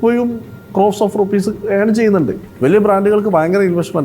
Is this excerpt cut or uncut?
cut